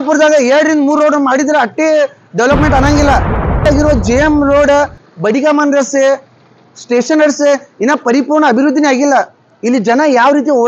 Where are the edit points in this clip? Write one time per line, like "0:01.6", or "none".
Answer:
0:03.6